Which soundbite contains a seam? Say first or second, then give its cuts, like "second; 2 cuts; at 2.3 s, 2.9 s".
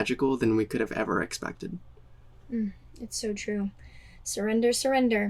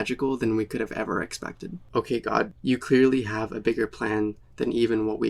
second; 1 cut; at 1.7 s